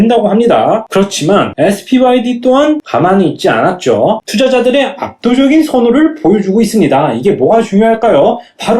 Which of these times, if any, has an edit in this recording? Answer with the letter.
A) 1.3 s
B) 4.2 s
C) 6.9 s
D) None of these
B